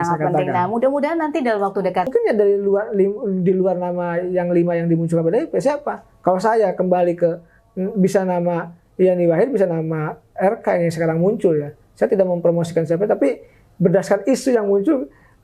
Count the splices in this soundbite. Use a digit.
1